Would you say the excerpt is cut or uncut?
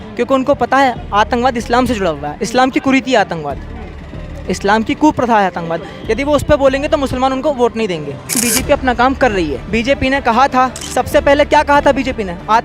cut